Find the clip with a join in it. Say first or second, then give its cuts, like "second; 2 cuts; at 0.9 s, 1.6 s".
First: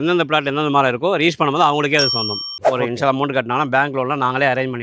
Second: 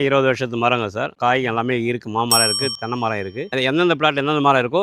first; 1 cut; at 2.5 s